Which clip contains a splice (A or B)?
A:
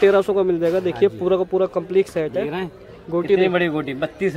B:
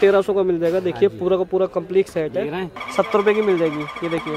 B